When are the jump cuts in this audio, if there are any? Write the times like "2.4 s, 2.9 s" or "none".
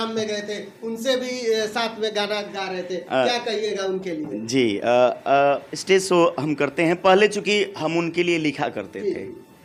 none